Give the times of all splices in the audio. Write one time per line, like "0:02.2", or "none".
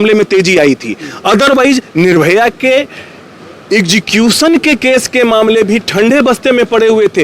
none

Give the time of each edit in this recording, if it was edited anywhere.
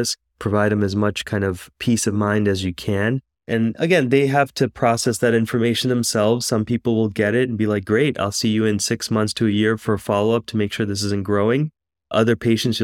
0:03.4

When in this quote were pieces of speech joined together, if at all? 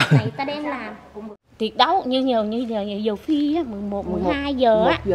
0:01.4

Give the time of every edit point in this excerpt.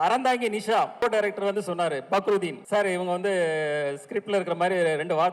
0:01.0
0:02.6

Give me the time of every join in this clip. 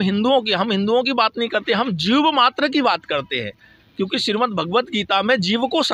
none

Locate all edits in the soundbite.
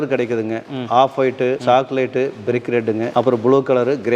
0:01.6
0:03.1

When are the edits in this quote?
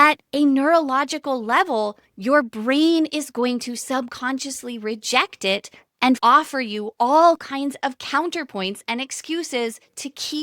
0:06.2

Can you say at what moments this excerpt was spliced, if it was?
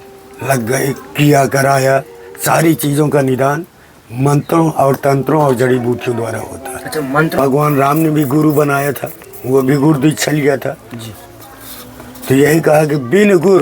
0:07.4

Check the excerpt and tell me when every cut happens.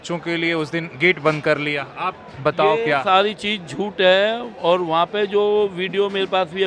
none

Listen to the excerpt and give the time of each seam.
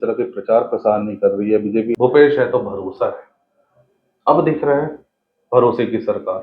0:01.9

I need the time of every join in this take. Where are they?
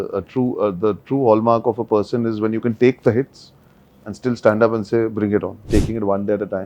0:05.6

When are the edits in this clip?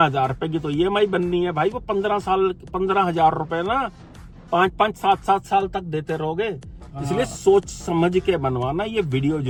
none

